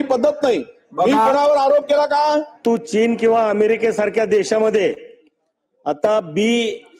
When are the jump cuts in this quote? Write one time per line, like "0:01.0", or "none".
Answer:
0:02.6